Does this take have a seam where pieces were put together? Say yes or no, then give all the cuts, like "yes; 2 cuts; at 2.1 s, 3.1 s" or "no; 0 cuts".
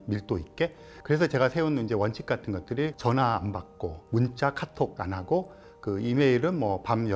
yes; 4 cuts; at 0.9 s, 3.0 s, 4.0 s, 5.0 s